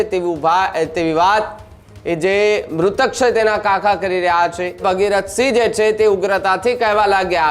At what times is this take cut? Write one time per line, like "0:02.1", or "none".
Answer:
0:04.8